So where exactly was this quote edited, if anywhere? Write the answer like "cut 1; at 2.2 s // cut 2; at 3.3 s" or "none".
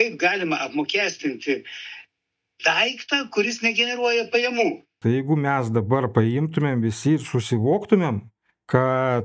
cut 1; at 4.9 s